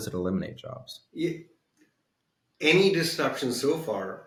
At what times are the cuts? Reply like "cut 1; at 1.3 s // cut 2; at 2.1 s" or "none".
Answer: none